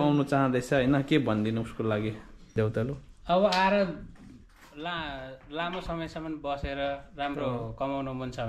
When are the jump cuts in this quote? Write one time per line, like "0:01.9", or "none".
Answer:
0:02.5